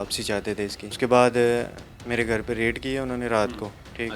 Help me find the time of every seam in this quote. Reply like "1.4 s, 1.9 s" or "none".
1.0 s